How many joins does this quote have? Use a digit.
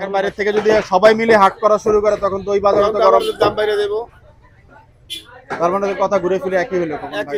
0